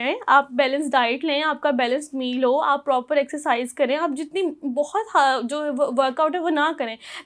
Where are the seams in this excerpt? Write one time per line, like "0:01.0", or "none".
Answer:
none